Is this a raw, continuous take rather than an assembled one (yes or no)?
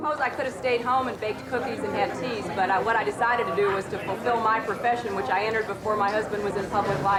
yes